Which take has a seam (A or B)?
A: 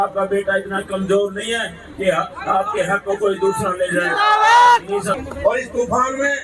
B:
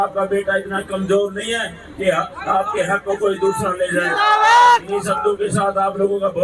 A